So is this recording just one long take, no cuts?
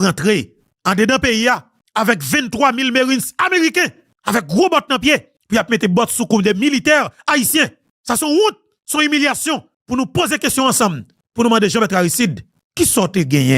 no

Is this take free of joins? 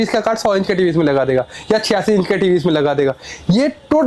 yes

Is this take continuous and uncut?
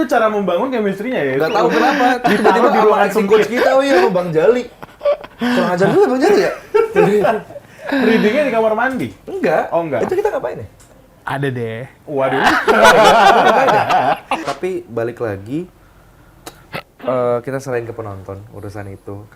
no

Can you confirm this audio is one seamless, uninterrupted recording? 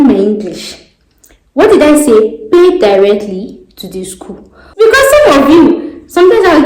no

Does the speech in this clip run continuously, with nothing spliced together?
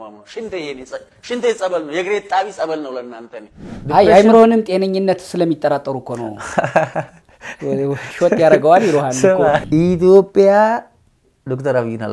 no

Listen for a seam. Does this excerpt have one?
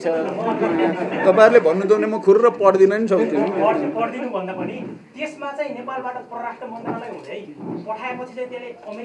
no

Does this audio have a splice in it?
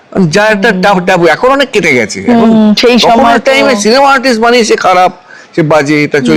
no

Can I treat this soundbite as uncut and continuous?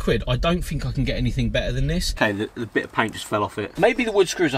no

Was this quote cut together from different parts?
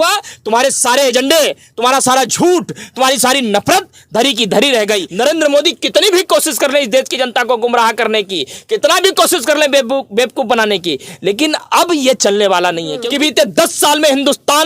yes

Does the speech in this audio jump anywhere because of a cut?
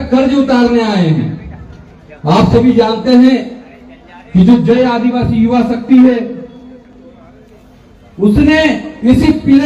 no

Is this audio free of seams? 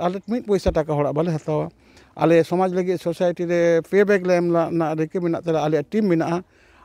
yes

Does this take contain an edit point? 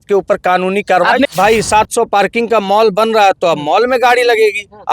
yes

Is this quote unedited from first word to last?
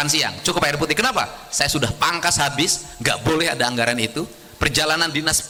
yes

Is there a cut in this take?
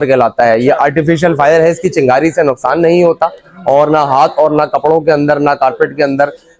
no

